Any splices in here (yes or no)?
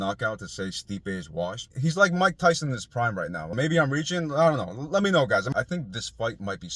yes